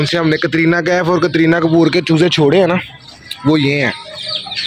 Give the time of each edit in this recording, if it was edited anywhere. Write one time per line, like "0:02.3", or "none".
none